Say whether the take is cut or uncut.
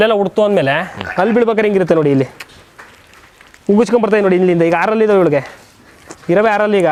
uncut